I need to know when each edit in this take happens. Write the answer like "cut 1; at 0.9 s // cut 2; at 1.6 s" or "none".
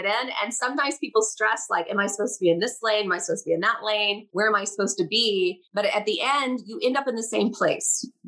none